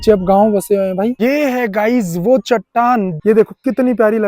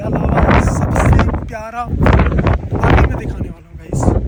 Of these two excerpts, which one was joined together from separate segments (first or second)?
first